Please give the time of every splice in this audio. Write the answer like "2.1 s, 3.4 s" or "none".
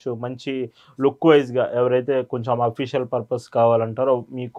none